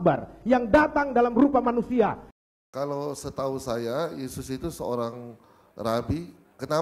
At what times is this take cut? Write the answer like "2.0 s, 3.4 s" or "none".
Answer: 2.5 s